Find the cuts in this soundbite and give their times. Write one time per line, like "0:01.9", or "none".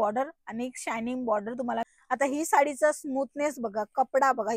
0:01.9